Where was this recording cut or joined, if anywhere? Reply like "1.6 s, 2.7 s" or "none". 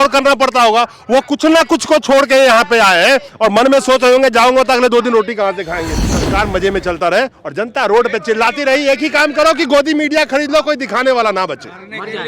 6.0 s